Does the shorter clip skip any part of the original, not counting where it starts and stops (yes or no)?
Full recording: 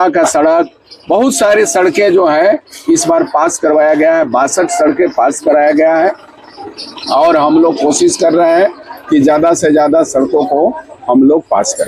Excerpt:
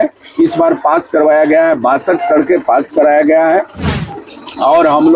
no